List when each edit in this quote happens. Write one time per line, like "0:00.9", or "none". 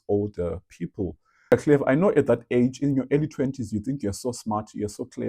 0:01.5